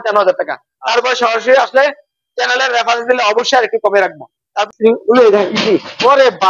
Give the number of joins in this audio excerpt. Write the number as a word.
one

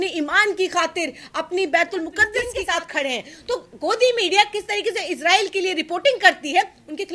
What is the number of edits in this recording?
one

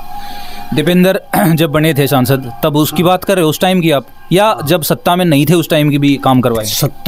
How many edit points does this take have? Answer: zero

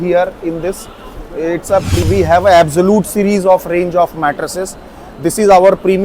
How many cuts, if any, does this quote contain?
one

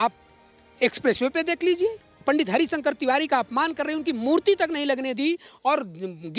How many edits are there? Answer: one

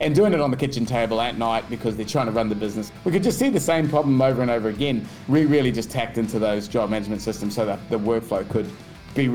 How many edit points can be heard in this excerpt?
two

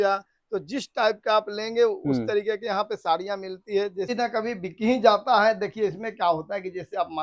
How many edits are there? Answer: one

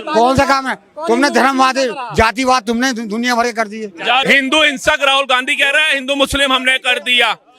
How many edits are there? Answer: one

